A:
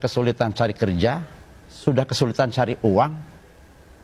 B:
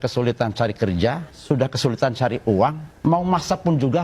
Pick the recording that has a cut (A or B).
B